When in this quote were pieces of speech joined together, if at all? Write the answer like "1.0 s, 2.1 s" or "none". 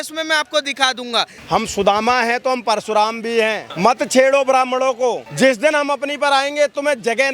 1.4 s, 3.7 s, 5.3 s